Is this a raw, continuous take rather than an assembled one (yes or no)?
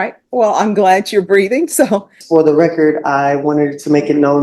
no